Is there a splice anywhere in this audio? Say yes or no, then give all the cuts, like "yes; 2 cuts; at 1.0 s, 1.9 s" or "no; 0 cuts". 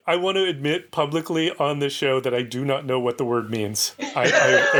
no; 0 cuts